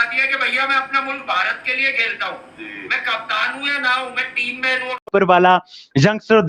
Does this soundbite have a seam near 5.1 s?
yes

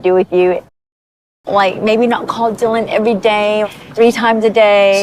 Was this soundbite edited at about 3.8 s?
no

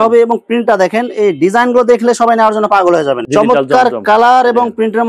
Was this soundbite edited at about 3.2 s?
yes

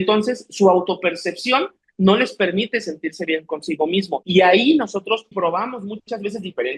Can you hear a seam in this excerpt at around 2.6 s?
no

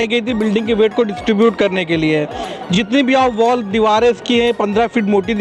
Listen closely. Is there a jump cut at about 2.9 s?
no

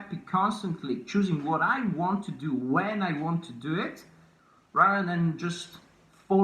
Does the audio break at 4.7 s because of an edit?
no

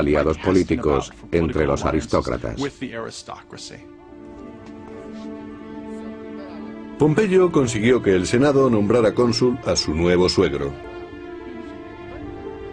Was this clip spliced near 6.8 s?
no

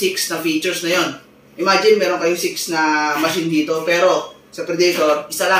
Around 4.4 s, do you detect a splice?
no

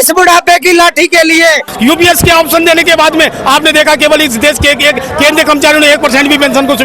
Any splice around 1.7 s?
yes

